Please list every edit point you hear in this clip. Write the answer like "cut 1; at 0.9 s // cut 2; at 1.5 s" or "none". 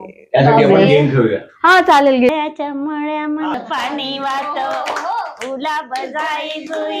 cut 1; at 2.3 s